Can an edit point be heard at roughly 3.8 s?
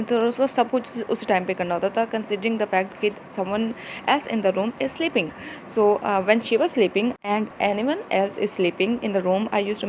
no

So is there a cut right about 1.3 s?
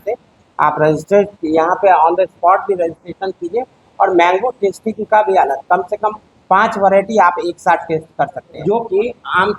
no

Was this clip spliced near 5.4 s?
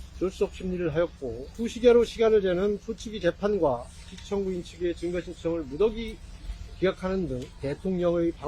no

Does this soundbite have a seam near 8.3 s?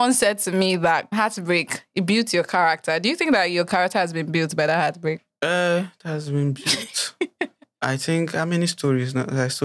no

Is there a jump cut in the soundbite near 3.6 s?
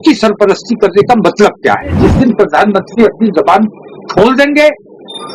no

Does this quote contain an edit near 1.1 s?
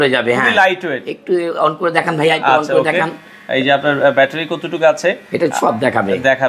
no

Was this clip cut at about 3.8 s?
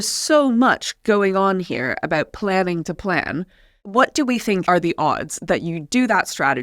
yes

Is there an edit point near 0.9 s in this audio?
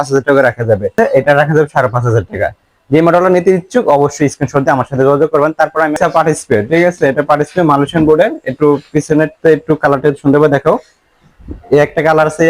yes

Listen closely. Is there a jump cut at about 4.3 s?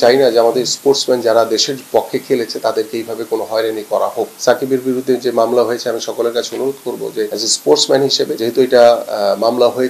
yes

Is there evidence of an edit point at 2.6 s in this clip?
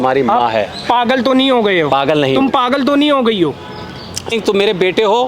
no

